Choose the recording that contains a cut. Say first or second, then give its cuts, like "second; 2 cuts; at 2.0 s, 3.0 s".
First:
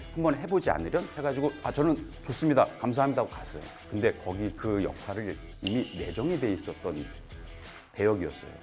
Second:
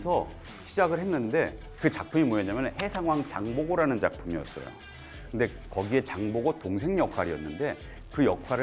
second; 1 cut; at 1.8 s